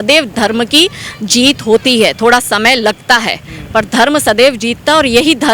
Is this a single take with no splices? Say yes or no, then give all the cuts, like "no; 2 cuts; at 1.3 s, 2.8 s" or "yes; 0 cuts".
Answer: yes; 0 cuts